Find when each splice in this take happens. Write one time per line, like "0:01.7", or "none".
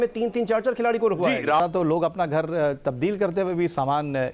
0:01.7